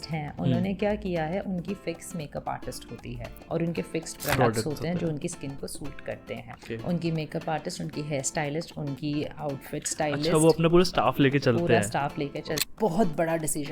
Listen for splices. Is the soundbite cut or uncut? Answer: cut